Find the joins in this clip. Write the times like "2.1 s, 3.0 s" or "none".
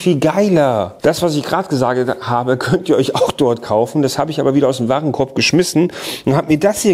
none